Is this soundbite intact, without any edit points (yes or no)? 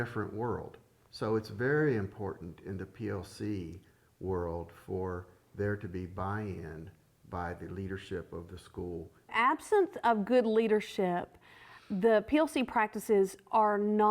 no